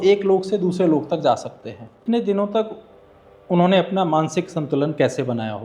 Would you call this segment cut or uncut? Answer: cut